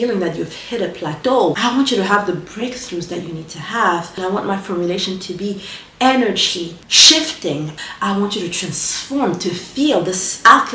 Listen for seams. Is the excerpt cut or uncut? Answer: cut